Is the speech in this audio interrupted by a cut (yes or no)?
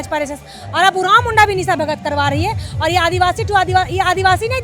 no